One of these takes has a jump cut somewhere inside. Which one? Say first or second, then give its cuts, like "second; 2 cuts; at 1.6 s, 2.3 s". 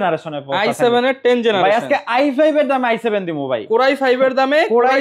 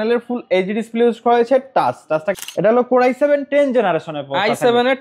second; 1 cut; at 2.4 s